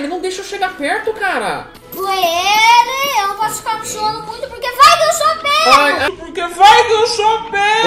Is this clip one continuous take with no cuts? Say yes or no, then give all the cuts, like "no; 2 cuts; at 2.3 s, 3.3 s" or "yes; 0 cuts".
no; 1 cut; at 1.8 s